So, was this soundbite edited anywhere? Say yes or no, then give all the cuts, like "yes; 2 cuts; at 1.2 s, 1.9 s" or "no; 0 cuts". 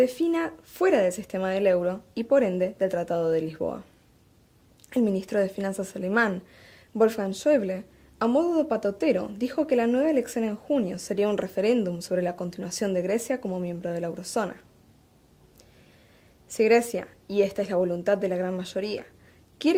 no; 0 cuts